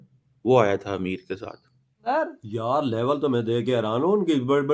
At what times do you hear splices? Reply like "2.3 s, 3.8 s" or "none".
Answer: 2.0 s